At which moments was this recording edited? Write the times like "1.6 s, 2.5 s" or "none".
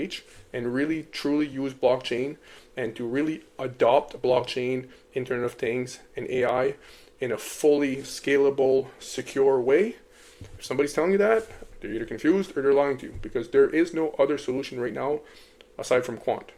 none